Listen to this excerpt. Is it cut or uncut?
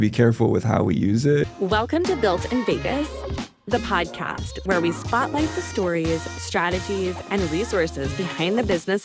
cut